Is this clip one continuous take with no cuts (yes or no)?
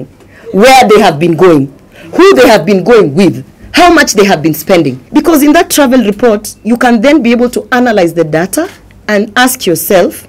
no